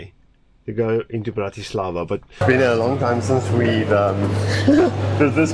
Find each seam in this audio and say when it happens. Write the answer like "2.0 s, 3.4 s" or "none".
2.4 s